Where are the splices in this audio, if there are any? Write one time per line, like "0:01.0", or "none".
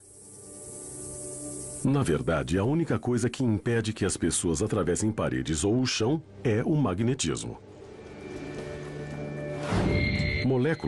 0:06.4

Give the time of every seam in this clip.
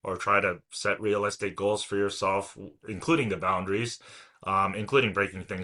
none

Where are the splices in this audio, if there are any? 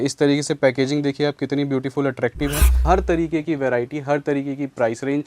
0:02.8

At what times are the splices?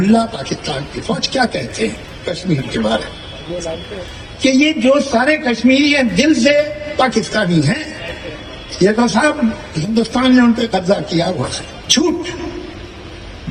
none

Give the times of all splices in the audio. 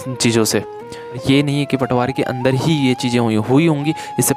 0:01.2

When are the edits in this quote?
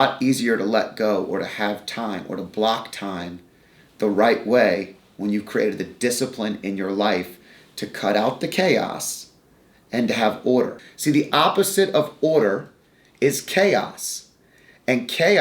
0:10.8

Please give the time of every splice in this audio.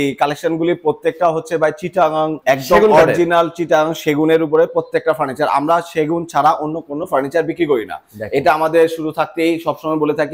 none

